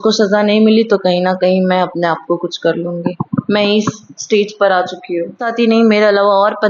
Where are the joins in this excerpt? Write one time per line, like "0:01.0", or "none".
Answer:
0:05.5